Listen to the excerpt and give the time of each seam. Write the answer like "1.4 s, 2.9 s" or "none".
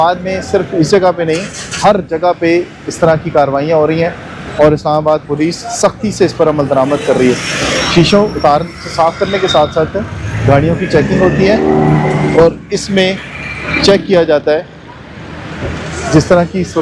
none